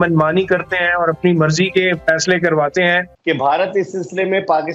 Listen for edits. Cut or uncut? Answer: cut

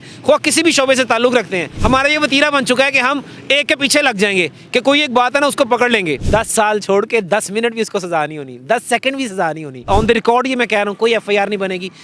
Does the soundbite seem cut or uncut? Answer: cut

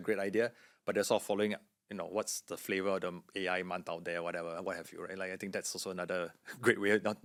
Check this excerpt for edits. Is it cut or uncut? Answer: uncut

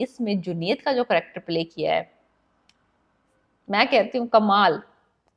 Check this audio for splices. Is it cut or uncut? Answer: uncut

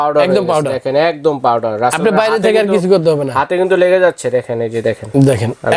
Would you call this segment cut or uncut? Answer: uncut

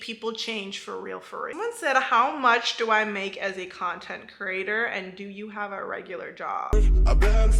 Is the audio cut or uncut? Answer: cut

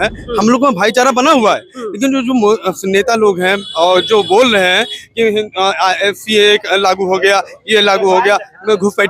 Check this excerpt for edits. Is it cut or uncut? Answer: uncut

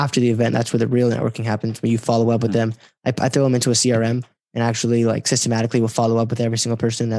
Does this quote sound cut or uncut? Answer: uncut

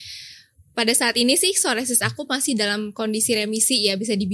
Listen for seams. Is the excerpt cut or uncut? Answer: uncut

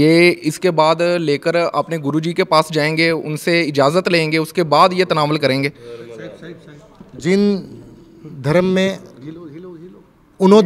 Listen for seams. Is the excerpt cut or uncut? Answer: uncut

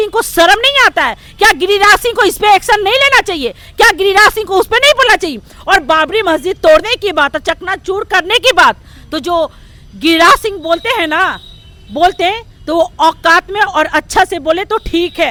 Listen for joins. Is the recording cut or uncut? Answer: uncut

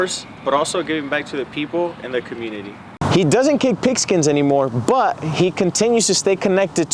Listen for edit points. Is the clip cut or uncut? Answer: cut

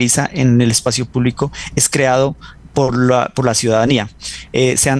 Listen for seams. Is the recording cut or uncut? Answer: uncut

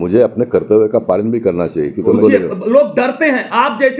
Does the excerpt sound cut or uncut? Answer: cut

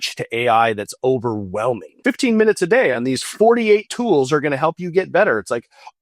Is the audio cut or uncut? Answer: cut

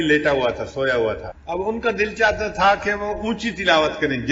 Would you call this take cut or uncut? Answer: cut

